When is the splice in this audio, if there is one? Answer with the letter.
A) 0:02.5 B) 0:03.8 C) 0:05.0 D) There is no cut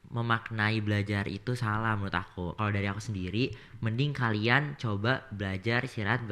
A